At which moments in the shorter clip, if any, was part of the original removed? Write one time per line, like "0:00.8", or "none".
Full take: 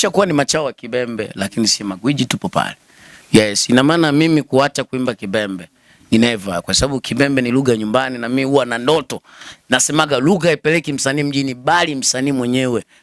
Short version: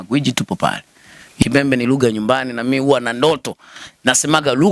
0:01.4